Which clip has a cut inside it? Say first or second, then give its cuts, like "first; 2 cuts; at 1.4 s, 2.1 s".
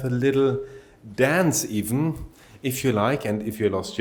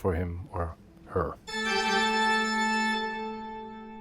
second; 1 cut; at 1.4 s